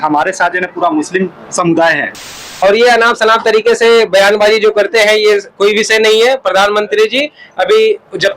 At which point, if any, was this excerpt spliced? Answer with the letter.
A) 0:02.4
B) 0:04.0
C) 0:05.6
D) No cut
A